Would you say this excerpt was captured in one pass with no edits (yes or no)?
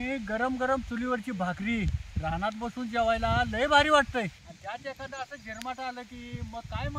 no